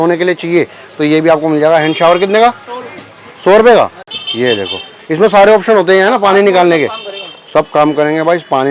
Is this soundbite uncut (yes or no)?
yes